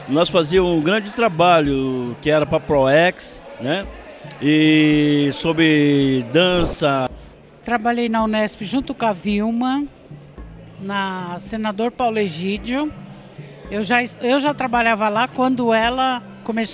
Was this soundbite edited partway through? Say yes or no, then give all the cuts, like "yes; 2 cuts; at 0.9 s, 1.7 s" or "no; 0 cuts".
yes; 1 cut; at 7.1 s